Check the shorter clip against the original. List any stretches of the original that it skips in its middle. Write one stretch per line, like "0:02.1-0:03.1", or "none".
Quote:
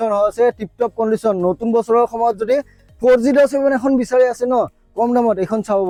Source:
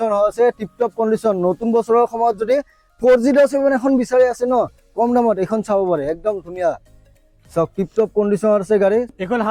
none